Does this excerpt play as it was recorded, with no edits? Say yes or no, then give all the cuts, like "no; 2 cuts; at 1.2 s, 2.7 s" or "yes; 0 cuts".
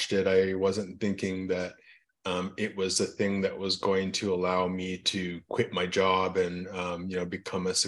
yes; 0 cuts